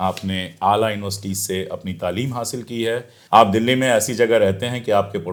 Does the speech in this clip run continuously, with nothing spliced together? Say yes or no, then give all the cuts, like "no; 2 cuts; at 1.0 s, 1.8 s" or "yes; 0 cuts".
yes; 0 cuts